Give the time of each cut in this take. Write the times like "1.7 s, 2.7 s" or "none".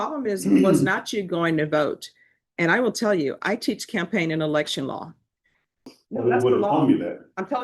5.9 s